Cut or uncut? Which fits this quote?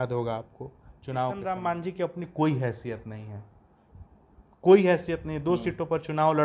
cut